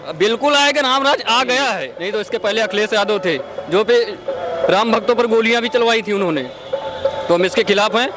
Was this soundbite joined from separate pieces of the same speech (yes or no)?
yes